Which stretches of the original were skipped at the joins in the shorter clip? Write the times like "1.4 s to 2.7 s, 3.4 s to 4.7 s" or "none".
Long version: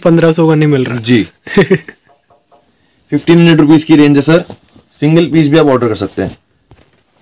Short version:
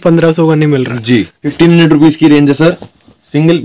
1.4 s to 3.1 s